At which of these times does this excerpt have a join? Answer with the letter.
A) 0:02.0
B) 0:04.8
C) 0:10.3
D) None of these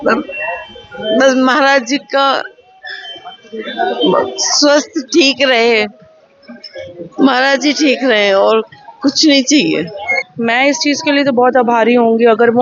C